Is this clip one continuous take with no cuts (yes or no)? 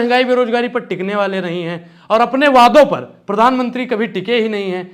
yes